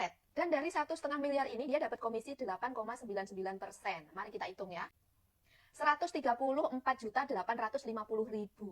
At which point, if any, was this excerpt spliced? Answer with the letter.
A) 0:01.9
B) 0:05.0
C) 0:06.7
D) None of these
B